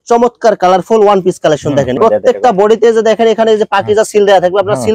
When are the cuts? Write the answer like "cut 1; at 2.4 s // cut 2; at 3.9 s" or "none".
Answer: cut 1; at 2.0 s